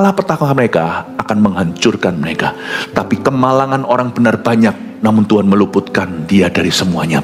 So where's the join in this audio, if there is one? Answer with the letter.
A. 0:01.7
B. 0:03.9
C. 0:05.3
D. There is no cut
D